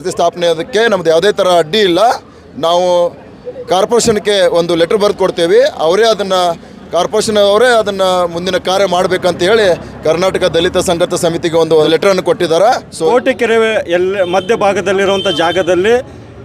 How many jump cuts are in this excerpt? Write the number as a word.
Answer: two